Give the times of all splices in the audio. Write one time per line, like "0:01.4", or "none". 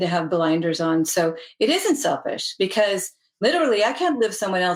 none